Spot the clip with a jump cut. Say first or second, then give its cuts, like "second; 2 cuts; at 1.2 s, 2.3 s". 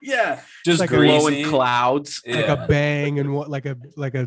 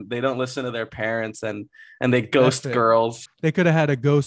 second; 1 cut; at 3.2 s